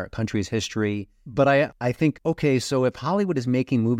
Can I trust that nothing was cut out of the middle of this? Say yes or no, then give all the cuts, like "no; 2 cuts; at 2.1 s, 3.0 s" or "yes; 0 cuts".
no; 2 cuts; at 1.2 s, 2.1 s